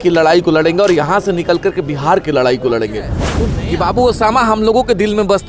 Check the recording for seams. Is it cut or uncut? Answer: cut